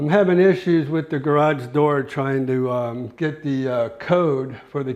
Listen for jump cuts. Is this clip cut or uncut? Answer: uncut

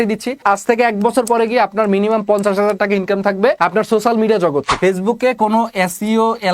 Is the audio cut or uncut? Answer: cut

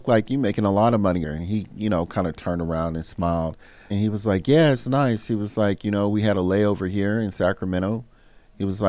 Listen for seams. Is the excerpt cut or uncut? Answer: cut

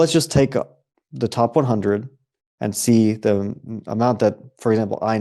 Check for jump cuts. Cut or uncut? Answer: uncut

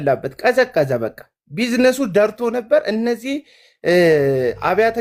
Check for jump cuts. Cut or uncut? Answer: uncut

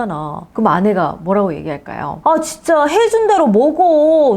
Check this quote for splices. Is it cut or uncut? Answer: cut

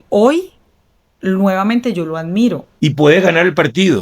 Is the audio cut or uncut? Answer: cut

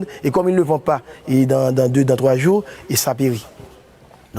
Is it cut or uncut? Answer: cut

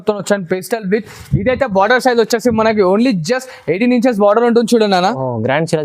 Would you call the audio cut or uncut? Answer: uncut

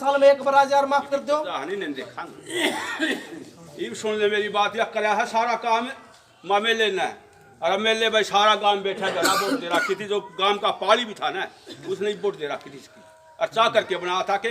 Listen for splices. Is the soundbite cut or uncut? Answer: cut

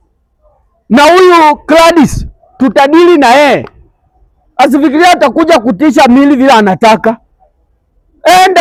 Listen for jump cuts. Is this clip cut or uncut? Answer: uncut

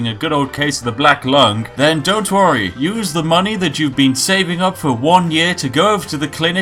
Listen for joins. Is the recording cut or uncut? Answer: uncut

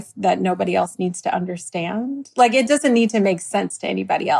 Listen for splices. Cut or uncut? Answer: uncut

